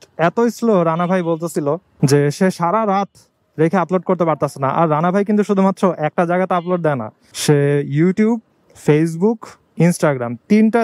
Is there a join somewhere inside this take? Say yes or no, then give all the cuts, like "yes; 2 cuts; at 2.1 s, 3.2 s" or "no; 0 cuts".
no; 0 cuts